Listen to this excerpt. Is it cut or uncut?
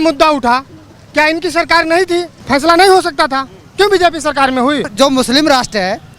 cut